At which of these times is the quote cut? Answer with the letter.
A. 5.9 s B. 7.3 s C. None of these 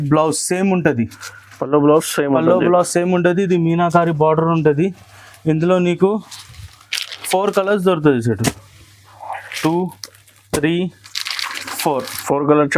C